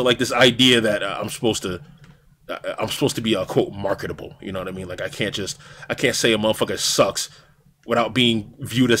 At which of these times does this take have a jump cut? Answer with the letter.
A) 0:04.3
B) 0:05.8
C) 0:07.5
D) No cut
D